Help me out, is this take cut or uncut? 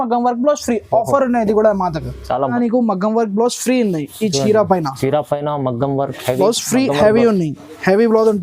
cut